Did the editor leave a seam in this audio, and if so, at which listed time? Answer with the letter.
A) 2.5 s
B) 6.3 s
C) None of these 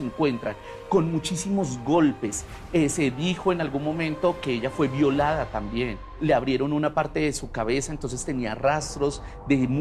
C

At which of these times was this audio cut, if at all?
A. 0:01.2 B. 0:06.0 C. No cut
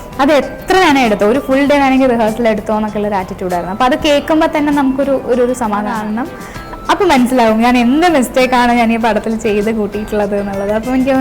B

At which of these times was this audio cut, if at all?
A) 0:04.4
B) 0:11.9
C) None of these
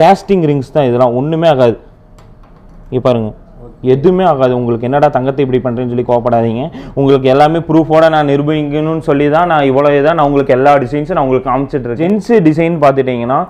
B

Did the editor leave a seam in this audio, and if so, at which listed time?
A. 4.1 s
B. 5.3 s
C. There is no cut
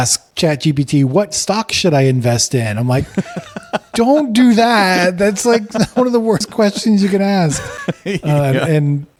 C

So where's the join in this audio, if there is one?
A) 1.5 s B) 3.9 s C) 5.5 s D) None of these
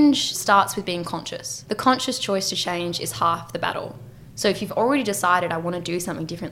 A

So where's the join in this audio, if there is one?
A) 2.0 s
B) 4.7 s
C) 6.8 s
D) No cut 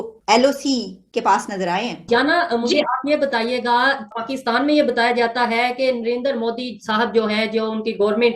A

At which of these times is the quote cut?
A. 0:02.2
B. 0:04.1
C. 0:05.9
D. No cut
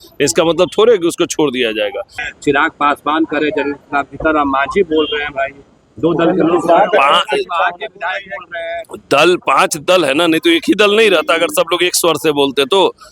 A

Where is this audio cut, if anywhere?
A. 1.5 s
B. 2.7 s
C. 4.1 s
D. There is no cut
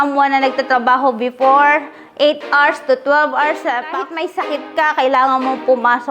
C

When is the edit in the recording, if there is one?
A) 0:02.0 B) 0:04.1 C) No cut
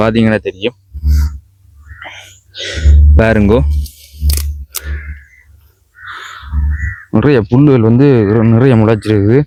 C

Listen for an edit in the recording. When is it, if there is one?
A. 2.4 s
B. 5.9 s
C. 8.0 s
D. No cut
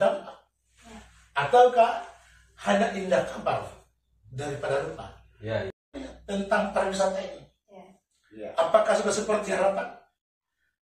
B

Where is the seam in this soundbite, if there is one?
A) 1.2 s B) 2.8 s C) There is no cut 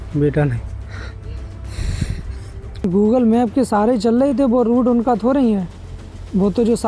B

